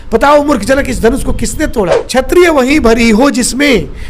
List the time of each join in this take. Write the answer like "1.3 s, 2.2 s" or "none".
2.0 s